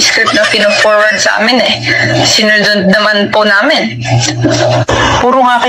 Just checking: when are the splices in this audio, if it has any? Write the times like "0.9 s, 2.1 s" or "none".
none